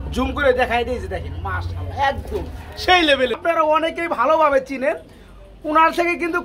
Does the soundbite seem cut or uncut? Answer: cut